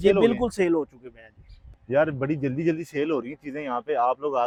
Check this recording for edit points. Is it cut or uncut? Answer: uncut